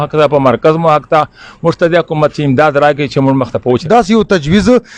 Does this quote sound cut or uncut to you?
cut